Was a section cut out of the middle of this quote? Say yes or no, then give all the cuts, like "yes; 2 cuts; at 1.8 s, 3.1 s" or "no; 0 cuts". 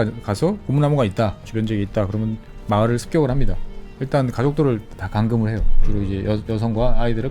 yes; 2 cuts; at 1.5 s, 3.9 s